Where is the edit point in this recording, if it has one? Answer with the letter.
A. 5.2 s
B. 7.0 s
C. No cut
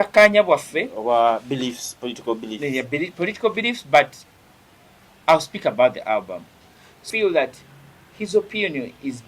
B